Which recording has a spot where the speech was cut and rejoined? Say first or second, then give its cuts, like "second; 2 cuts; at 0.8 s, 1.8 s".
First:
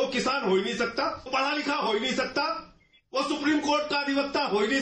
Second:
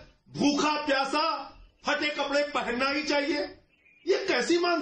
first; 1 cut; at 1.3 s